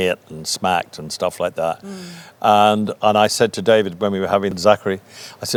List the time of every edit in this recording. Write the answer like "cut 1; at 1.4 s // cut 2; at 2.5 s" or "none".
none